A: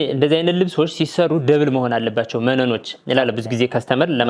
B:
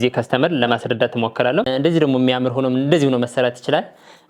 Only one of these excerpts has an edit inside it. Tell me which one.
B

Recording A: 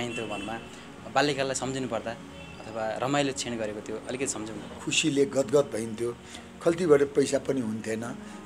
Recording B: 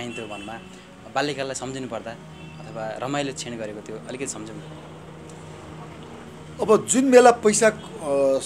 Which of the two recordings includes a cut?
A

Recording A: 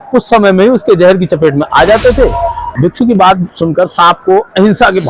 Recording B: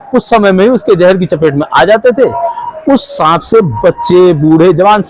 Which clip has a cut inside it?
A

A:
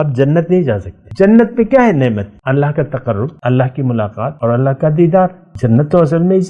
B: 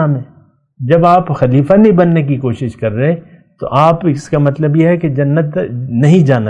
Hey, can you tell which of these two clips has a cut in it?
A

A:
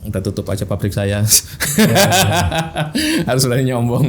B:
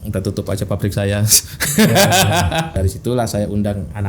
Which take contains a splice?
B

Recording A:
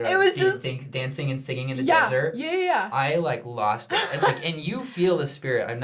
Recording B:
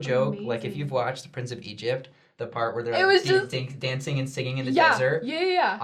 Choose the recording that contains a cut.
A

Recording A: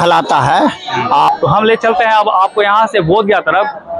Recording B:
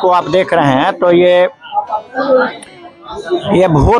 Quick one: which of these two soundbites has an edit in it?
A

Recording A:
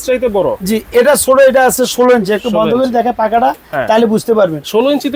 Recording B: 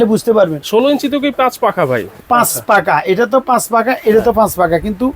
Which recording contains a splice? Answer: B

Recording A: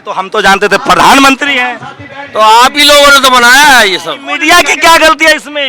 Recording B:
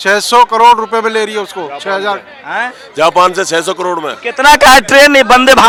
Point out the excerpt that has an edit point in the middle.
A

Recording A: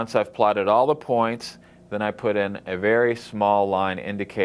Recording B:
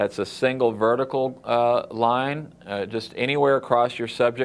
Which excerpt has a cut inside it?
A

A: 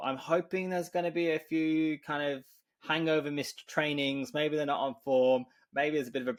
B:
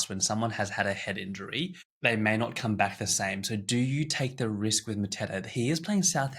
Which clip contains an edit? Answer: B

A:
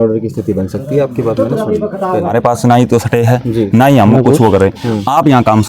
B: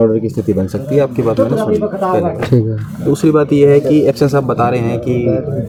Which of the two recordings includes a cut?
A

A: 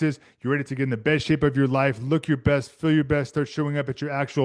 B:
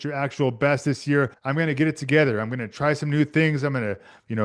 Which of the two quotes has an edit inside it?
B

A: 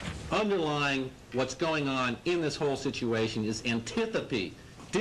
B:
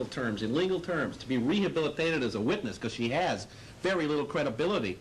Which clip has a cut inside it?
A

